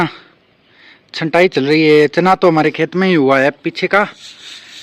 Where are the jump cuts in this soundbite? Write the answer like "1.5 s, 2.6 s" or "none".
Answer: none